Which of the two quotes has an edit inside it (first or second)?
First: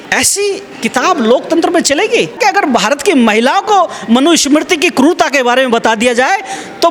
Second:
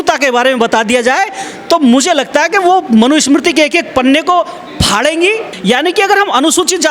second